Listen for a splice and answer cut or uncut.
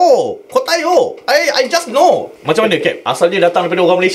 cut